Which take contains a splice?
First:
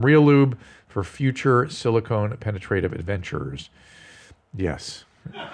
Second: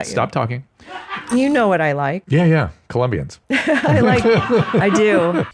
second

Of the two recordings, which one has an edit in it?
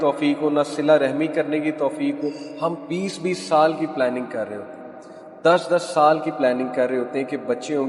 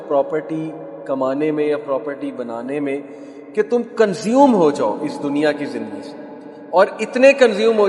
first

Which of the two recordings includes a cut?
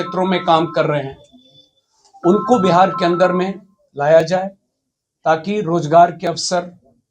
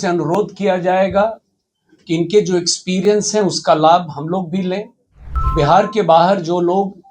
second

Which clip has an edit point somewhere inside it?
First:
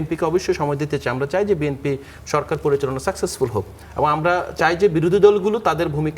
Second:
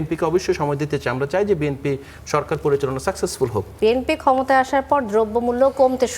second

